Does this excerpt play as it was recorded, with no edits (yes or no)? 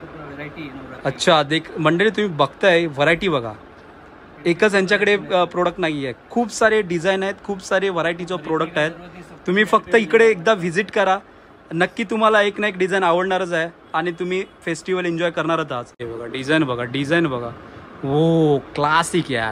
no